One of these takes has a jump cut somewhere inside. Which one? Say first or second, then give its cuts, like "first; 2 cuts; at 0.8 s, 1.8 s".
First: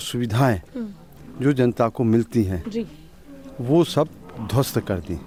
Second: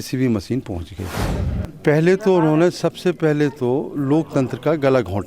second; 1 cut; at 1.3 s